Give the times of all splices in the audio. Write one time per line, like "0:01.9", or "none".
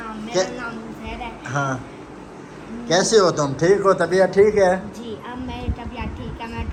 none